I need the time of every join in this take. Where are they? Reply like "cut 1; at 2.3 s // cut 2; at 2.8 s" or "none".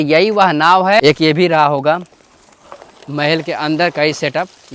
cut 1; at 1.0 s